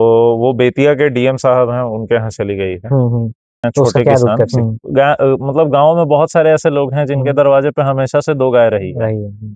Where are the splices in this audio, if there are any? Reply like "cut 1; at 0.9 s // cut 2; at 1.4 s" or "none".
cut 1; at 4.5 s